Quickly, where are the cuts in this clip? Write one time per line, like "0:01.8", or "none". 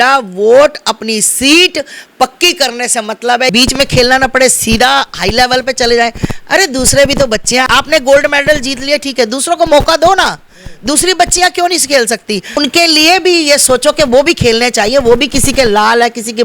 0:03.5
0:07.7
0:12.6